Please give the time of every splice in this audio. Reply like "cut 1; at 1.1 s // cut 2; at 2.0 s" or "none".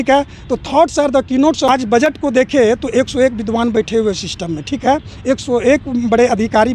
cut 1; at 1.7 s